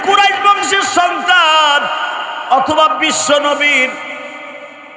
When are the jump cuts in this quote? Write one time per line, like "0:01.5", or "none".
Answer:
none